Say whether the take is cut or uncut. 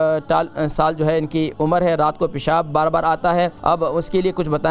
cut